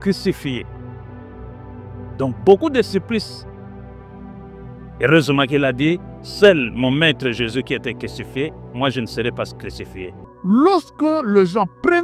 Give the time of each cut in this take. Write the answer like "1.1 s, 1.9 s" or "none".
10.3 s